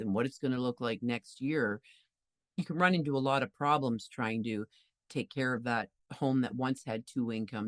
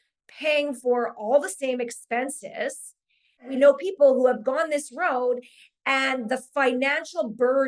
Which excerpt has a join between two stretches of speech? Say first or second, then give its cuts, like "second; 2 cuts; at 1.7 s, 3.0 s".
second; 1 cut; at 3.5 s